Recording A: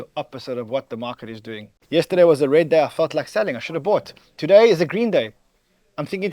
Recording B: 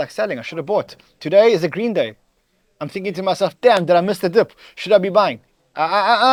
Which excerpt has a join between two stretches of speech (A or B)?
A